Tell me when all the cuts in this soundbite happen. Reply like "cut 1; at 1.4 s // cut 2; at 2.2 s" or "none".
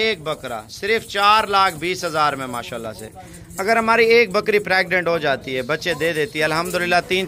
none